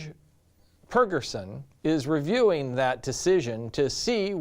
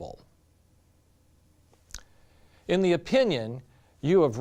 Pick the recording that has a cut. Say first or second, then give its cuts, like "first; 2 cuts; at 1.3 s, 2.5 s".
first; 1 cut; at 3.0 s